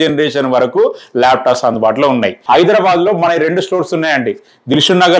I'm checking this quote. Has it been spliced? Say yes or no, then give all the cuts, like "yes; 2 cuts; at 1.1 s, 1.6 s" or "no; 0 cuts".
yes; 1 cut; at 2.4 s